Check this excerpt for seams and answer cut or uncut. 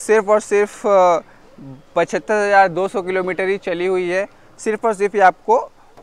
uncut